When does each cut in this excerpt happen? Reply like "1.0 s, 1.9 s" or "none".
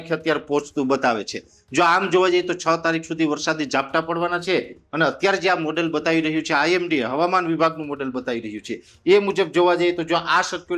none